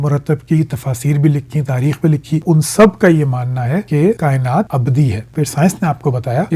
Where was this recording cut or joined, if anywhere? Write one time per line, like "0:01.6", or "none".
0:05.2

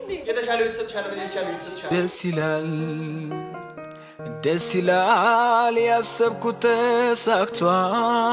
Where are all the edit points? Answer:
0:01.7

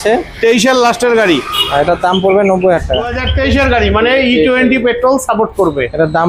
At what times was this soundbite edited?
0:03.2

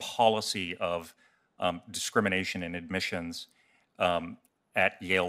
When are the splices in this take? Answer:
none

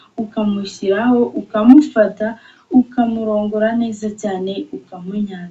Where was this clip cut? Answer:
none

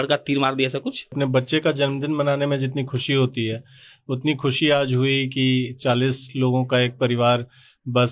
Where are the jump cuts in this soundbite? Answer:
0:01.2

